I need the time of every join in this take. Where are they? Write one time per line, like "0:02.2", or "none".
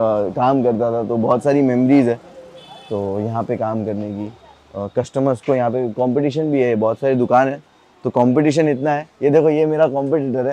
none

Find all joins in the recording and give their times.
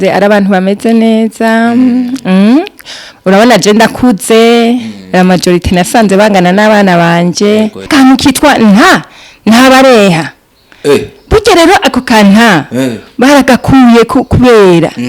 0:07.9

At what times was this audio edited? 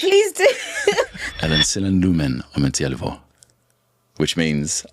0:01.2

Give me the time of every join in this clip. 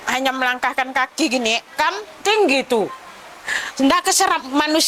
none

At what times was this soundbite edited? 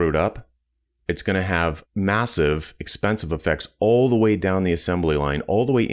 0:01.8

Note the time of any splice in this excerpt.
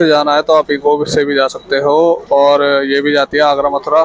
none

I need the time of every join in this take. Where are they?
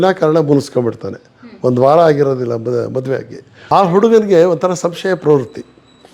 0:03.5

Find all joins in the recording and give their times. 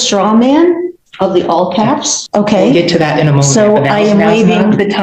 0:02.2

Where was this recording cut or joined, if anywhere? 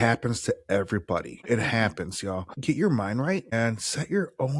0:01.4
0:02.5
0:03.5

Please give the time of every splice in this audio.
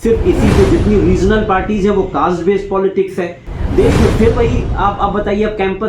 0:03.6

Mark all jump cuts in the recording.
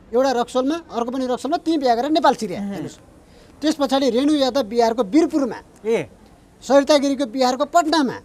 none

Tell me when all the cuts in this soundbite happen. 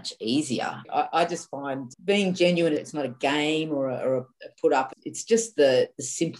0:00.8
0:01.9
0:02.8

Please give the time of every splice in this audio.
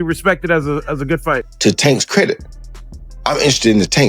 0:01.5

